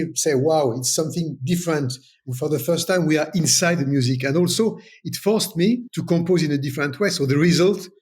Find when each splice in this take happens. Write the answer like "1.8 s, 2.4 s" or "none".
5.9 s